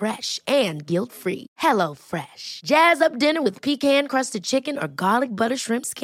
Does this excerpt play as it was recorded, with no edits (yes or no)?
yes